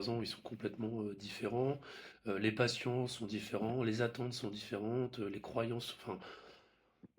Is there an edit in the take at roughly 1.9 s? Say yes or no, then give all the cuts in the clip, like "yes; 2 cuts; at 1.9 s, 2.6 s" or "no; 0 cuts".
no; 0 cuts